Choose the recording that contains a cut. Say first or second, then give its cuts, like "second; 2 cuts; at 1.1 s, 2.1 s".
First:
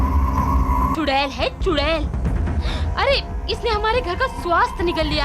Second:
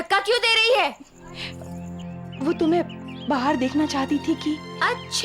first; 1 cut; at 0.9 s